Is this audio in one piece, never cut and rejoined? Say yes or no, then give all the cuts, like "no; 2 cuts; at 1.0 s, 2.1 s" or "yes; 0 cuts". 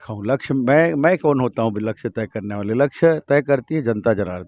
yes; 0 cuts